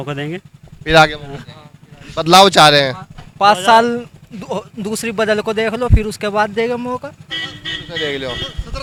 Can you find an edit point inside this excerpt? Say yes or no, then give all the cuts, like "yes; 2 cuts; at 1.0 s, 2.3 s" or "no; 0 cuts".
no; 0 cuts